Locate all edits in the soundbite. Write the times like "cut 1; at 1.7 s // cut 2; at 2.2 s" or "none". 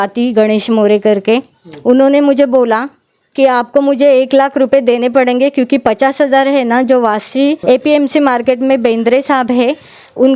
cut 1; at 7.6 s